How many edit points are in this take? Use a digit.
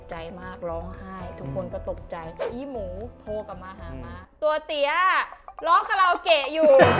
1